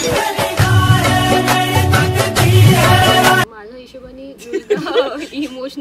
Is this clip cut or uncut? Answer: cut